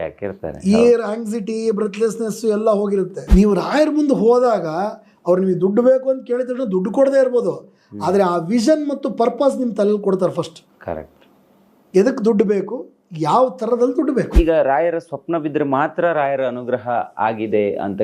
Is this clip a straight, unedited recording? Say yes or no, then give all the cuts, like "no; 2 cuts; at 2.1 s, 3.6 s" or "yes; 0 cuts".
no; 2 cuts; at 3.2 s, 14.3 s